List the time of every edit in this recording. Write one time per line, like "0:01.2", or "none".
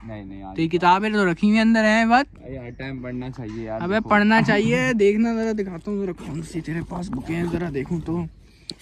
none

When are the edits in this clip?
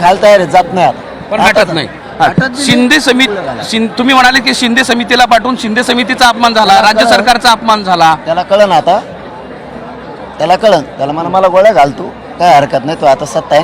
none

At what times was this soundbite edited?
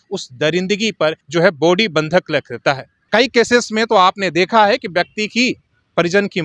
0:01.2
0:02.9

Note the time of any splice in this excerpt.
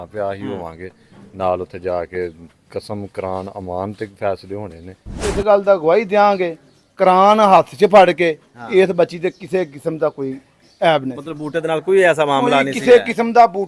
0:05.3

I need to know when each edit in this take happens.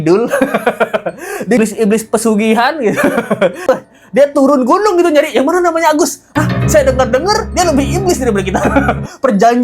0:01.6

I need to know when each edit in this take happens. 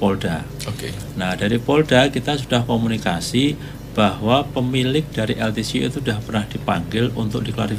none

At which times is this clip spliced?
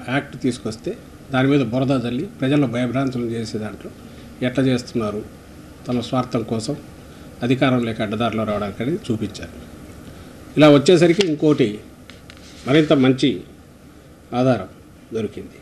none

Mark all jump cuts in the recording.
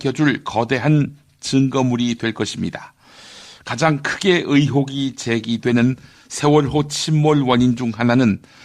0:04.1

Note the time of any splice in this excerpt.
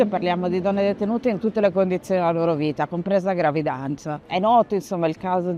0:04.1

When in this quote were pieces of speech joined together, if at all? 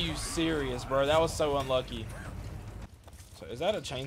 0:02.9

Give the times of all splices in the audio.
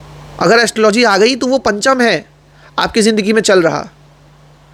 none

